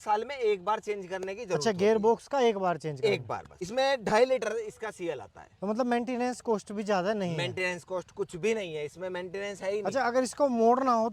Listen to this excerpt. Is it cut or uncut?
uncut